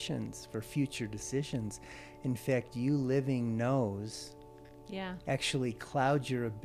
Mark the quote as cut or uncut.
uncut